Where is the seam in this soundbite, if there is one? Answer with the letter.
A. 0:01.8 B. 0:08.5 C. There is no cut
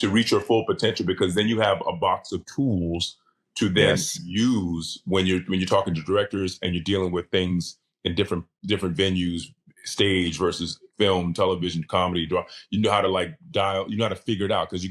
C